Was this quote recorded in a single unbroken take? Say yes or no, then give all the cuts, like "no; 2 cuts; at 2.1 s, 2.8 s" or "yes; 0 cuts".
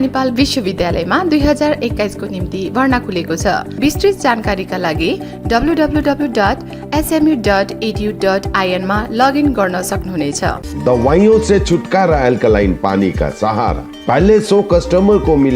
no; 2 cuts; at 3.7 s, 10.7 s